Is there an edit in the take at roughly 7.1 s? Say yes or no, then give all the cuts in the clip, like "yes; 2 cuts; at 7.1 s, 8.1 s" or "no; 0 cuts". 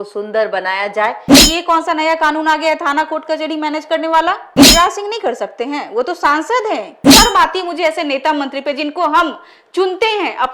yes; 3 cuts; at 1.4 s, 4.5 s, 7.1 s